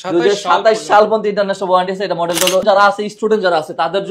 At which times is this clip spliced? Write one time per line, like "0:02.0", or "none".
0:02.6